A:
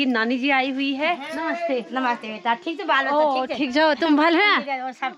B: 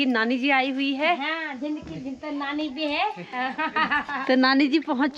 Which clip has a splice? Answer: A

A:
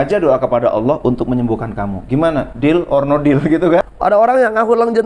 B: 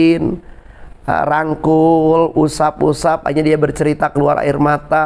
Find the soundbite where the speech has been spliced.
A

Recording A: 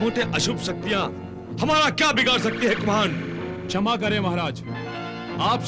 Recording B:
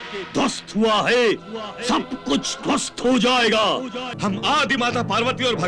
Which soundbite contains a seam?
B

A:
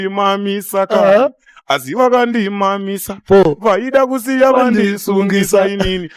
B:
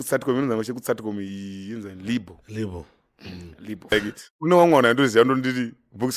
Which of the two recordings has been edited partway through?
B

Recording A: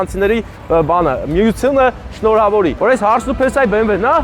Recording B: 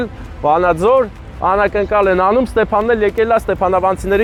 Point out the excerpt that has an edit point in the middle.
A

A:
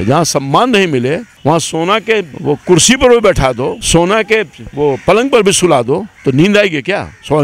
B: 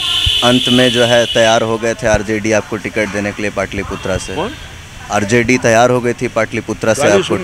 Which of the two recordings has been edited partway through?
A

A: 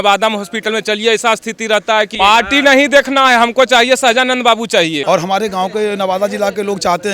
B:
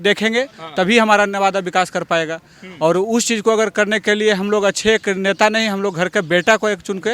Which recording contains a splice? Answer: A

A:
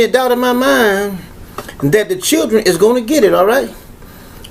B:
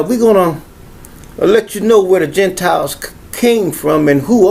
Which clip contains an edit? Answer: A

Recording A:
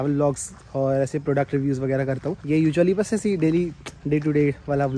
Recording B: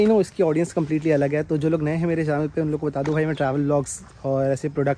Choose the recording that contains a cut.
A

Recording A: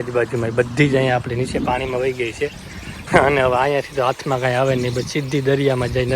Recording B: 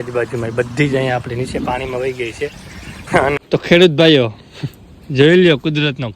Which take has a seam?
B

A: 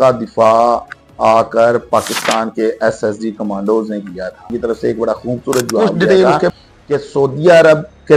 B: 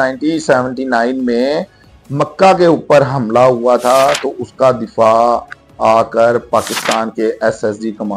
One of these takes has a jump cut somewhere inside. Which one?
A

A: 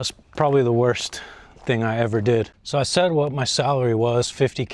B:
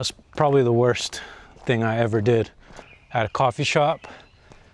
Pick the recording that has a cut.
B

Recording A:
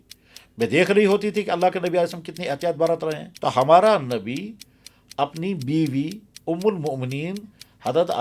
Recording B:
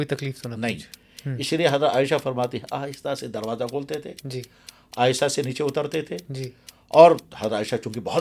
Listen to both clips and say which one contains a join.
A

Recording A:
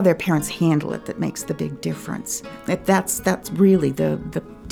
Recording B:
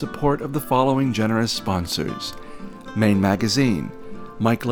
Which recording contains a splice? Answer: A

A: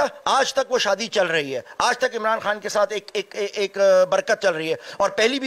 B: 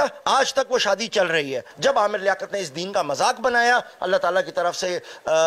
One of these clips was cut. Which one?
B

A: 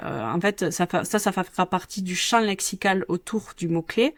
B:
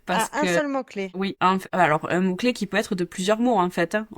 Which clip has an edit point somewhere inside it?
B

